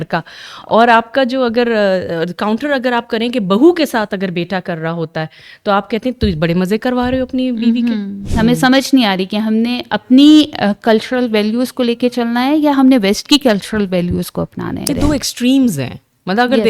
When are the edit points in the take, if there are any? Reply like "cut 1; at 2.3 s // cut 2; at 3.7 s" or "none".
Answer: cut 1; at 8.2 s // cut 2; at 14.9 s